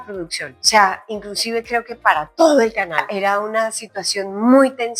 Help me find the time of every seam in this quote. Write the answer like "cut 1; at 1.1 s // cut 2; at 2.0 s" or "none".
cut 1; at 3.1 s